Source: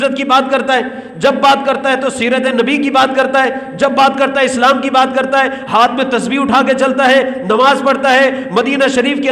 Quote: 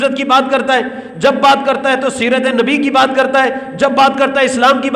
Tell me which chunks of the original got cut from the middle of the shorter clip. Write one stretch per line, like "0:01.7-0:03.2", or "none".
none